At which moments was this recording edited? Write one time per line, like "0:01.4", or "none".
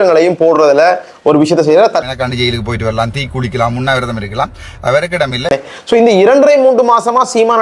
0:02.1
0:05.5